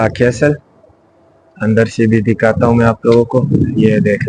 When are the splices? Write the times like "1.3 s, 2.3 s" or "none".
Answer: none